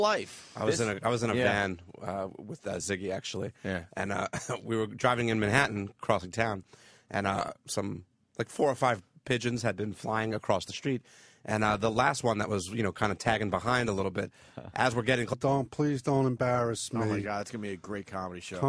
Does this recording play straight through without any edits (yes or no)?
yes